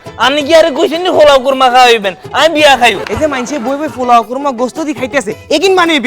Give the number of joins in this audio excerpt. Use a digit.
1